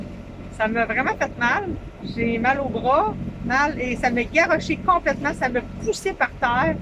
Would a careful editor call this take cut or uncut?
uncut